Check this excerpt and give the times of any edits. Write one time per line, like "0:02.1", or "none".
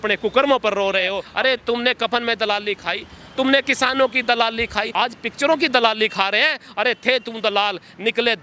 0:01.2